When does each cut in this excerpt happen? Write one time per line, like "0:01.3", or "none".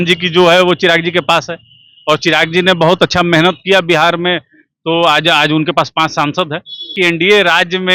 0:06.9